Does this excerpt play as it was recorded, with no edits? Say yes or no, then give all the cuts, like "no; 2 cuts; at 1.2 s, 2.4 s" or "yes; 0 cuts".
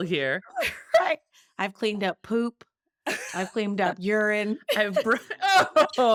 yes; 0 cuts